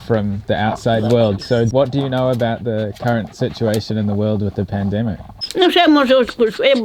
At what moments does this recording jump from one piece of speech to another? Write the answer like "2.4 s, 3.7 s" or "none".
none